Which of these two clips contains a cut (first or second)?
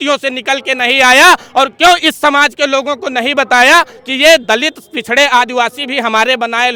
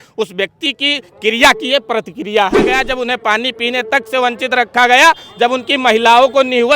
second